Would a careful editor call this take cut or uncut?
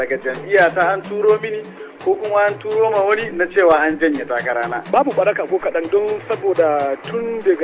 cut